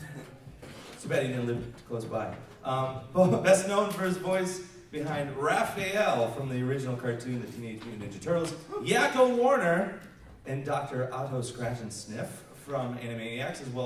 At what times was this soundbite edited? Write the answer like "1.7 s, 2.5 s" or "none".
2.5 s